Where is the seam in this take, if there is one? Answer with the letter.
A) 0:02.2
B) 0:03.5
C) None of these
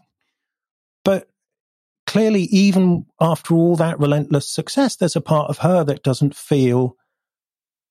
C